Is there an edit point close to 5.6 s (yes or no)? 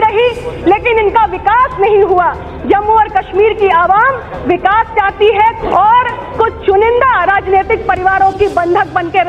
yes